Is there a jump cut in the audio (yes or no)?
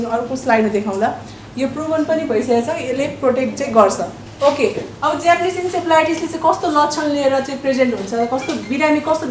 no